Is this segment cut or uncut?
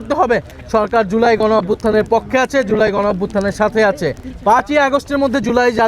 cut